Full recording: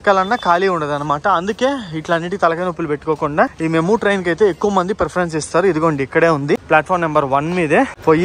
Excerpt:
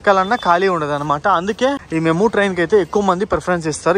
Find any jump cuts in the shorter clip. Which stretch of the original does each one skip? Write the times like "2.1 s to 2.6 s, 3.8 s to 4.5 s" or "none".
1.9 s to 3.5 s